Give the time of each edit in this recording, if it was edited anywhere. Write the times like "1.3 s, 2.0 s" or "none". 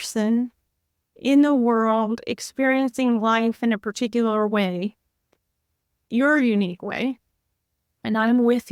none